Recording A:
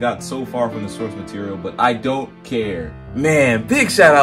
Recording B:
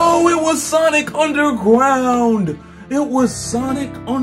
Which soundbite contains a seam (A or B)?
A